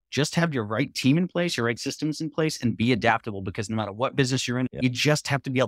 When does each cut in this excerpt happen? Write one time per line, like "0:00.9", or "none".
0:04.7